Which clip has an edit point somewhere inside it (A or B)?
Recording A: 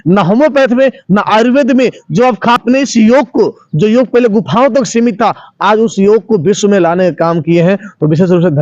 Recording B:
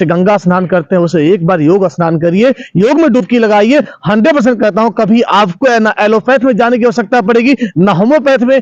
A